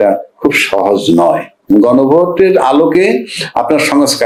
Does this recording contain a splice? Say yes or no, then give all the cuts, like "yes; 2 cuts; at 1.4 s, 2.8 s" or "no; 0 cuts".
no; 0 cuts